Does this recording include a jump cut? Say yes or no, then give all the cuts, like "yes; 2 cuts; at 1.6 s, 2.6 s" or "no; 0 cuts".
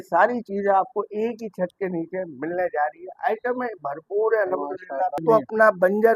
yes; 1 cut; at 5.2 s